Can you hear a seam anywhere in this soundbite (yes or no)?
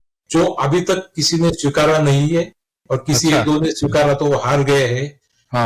no